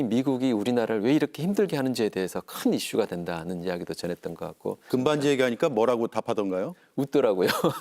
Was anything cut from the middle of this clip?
yes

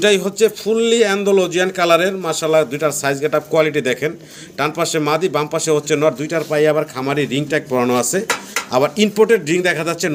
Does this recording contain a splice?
no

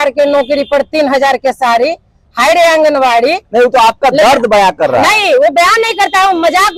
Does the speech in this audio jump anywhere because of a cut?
no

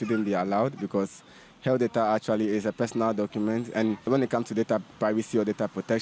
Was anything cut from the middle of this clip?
yes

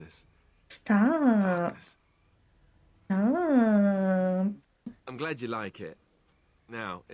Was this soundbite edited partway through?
yes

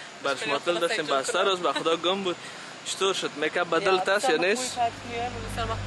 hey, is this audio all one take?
yes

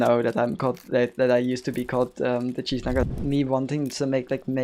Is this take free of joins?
no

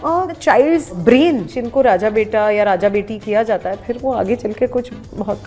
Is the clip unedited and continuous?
no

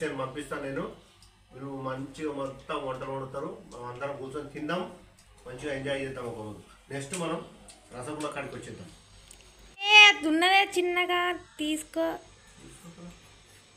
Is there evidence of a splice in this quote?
no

